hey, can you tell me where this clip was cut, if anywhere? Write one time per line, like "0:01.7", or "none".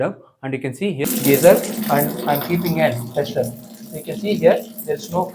0:01.0

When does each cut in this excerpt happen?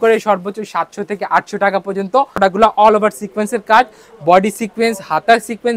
0:02.3

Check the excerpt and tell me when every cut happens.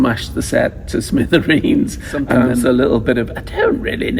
0:02.5

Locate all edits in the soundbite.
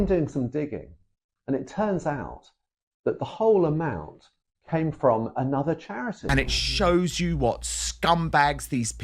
0:06.2

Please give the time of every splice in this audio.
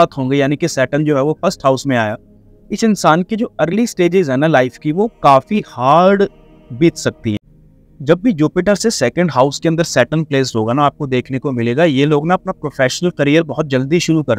0:07.5

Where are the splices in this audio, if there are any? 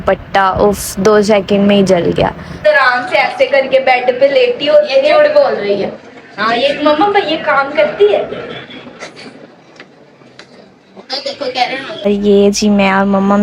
0:02.5
0:12.1

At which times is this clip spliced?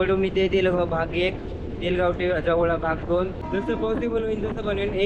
0:03.4

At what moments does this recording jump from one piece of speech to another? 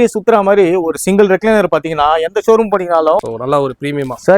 0:03.2

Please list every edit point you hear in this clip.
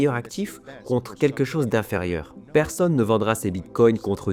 none

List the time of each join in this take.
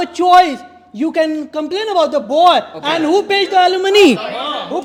none

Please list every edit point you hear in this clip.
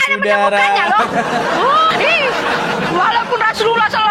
0:01.9

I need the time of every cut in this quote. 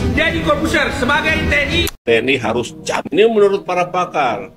0:01.9

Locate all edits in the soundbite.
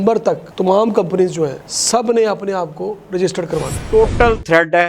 0:01.6
0:03.8

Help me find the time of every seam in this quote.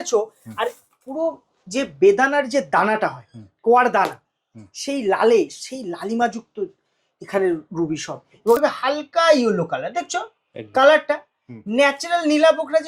0:08.6

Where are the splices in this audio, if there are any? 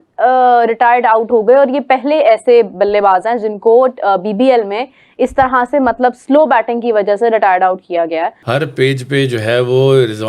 0:08.4

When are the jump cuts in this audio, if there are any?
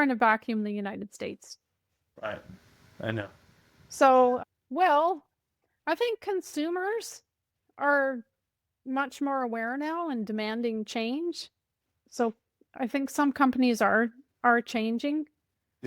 none

